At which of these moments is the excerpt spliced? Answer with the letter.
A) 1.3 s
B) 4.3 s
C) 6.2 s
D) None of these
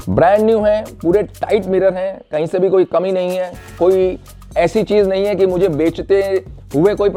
D